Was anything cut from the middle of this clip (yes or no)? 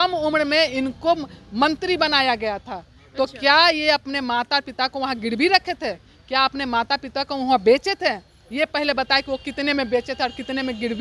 no